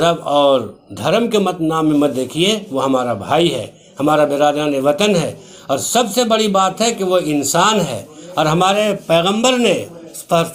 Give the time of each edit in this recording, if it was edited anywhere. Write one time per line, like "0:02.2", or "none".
none